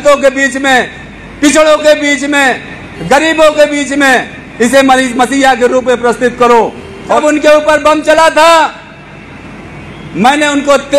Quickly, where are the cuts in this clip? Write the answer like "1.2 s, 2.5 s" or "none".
7.2 s